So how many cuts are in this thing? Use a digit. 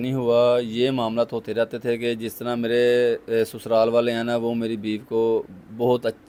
0